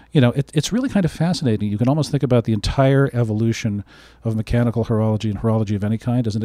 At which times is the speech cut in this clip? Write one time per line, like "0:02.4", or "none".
none

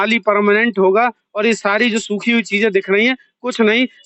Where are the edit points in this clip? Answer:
none

